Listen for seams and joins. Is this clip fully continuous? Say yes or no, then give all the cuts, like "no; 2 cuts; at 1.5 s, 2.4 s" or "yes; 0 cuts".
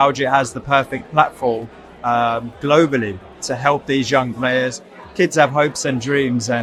yes; 0 cuts